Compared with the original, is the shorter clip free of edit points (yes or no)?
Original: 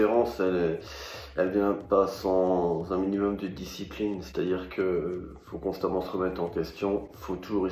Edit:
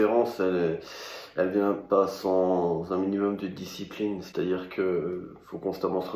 yes